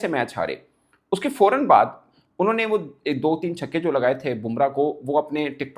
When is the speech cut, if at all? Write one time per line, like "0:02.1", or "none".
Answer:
0:02.1